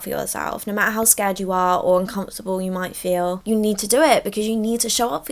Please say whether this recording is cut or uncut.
uncut